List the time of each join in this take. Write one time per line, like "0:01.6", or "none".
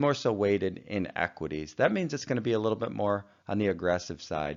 none